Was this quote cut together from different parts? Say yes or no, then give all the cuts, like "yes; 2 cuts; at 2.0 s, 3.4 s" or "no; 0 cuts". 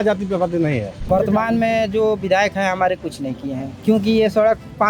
yes; 2 cuts; at 1.0 s, 3.7 s